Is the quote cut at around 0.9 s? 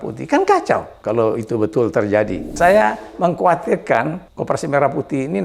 yes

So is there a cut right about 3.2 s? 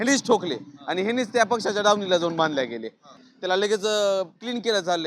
yes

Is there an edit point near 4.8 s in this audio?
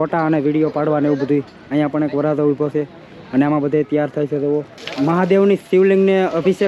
yes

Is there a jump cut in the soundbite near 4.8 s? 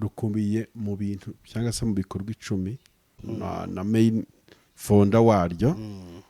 no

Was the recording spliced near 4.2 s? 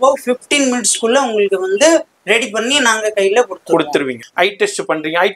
yes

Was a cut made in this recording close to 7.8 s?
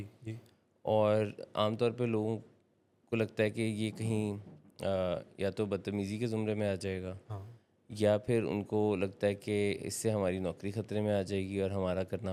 no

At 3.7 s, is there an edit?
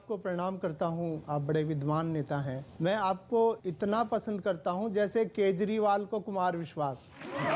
yes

